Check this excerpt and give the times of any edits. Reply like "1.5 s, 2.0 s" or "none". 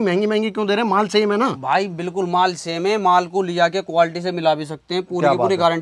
none